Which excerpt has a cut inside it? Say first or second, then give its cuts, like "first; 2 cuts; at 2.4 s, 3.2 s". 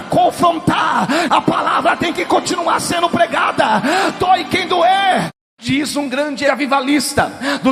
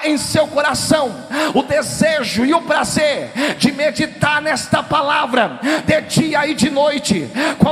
first; 3 cuts; at 1.3 s, 5.3 s, 6.5 s